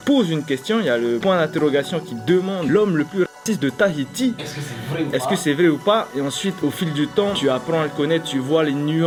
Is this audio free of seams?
yes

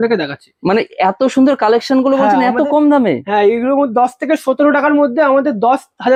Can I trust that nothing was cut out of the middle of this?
yes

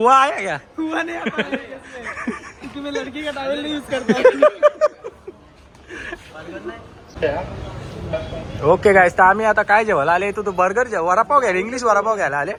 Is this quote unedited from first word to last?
yes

